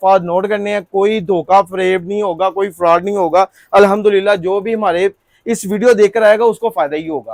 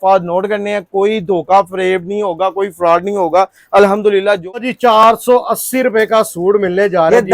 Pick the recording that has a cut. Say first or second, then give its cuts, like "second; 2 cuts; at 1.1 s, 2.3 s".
second; 1 cut; at 4.6 s